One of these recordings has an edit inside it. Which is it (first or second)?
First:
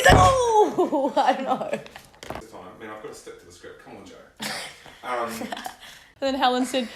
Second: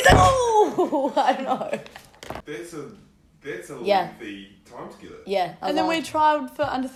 first